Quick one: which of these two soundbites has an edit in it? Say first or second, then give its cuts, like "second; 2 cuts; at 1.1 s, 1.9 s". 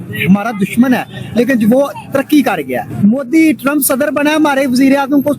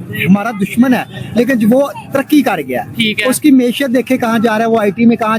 first; 1 cut; at 2.9 s